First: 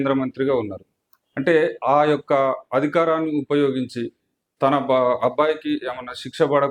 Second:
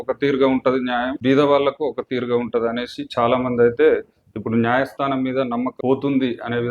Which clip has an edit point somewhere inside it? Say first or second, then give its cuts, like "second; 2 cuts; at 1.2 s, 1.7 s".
second; 2 cuts; at 1.1 s, 5.7 s